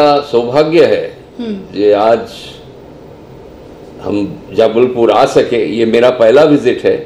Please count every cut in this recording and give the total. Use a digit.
0